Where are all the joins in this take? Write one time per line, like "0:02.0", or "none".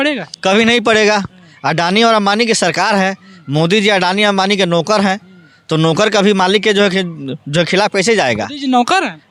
none